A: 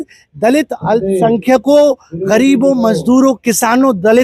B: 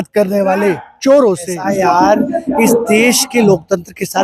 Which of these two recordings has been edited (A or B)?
B